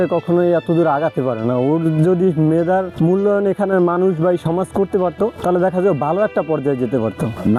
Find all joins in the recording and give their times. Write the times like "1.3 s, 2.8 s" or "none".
none